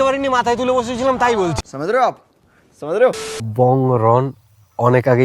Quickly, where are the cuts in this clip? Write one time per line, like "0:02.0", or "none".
0:01.5
0:03.2